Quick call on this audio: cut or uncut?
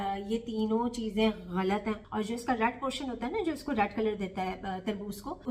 cut